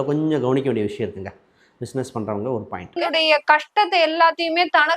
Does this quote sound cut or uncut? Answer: cut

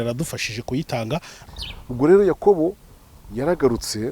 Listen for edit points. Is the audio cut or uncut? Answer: cut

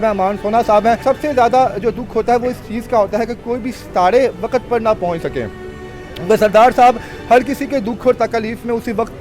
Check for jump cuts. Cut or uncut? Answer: cut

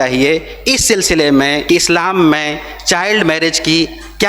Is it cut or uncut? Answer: cut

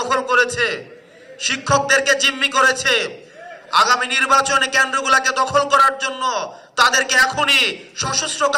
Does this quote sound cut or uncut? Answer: uncut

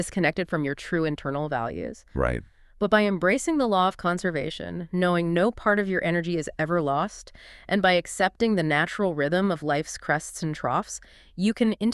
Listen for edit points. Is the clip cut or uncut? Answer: uncut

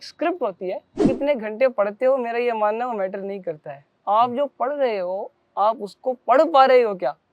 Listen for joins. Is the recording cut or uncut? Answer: cut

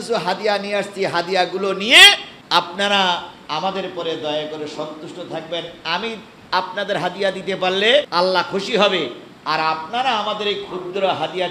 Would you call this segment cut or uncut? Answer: cut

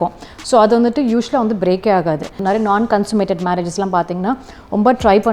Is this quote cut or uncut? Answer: cut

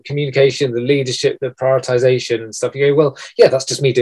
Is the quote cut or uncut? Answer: uncut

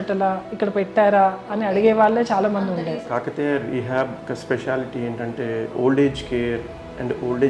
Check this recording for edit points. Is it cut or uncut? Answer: cut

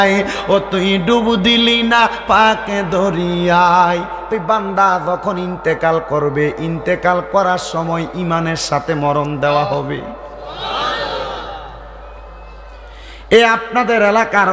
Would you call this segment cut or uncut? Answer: cut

